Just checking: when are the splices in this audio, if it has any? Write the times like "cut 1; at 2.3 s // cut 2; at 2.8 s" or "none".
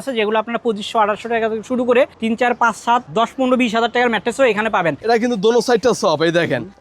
cut 1; at 5.0 s

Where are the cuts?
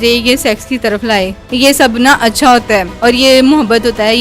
cut 1; at 1.4 s // cut 2; at 2.9 s

